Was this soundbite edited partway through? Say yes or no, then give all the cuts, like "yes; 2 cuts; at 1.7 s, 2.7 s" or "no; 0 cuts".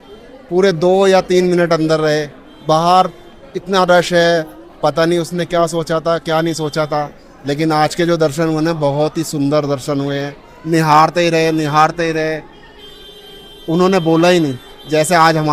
no; 0 cuts